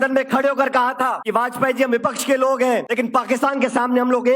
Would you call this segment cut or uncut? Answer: cut